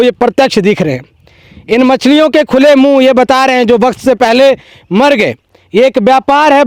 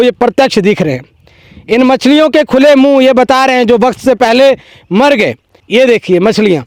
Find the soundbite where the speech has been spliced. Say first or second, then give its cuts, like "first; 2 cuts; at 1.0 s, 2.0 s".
second; 1 cut; at 5.5 s